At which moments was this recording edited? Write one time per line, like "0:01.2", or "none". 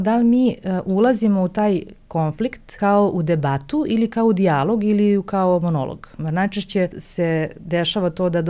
0:02.6
0:06.2
0:07.0